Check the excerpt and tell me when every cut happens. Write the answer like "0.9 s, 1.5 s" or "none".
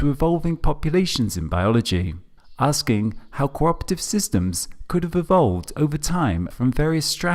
6.3 s